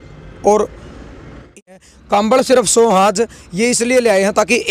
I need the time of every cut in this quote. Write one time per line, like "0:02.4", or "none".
0:01.6